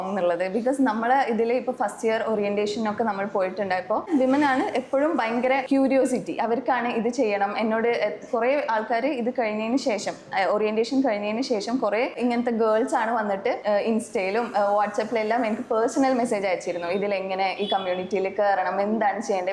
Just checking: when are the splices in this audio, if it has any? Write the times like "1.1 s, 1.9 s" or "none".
none